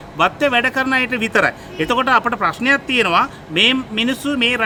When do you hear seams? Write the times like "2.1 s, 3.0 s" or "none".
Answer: none